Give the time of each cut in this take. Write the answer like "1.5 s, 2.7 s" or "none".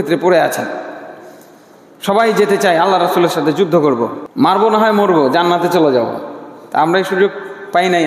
4.2 s

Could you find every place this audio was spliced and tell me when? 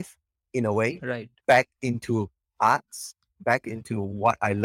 none

